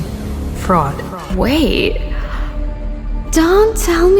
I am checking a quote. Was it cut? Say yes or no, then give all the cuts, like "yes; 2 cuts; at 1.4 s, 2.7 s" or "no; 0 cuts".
yes; 1 cut; at 1.3 s